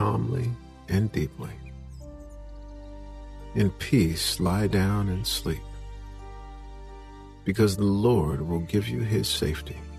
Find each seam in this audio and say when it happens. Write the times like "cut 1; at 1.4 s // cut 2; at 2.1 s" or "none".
cut 1; at 1.6 s // cut 2; at 3.0 s // cut 3; at 5.7 s // cut 4; at 7.4 s